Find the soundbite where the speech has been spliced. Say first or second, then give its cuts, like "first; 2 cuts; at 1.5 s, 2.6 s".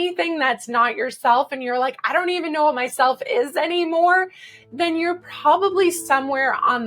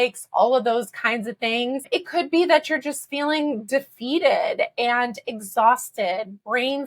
second; 1 cut; at 1.9 s